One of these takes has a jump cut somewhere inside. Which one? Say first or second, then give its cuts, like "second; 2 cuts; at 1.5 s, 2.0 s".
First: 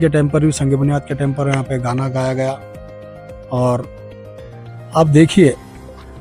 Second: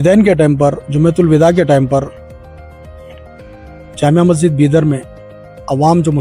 second; 2 cuts; at 2.1 s, 3.5 s